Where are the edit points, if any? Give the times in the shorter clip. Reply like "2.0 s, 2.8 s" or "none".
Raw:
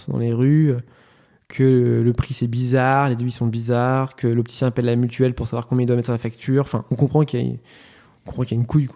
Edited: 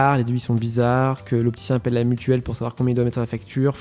none